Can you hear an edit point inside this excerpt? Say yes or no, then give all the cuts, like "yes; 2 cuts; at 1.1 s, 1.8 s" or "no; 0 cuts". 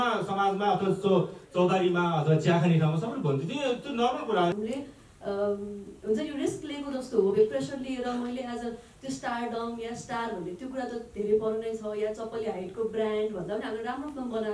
yes; 1 cut; at 4.6 s